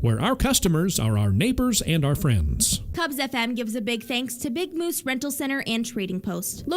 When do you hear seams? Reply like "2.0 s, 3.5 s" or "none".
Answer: 3.1 s